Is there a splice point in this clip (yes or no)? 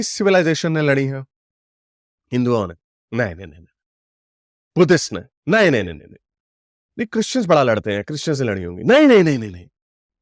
no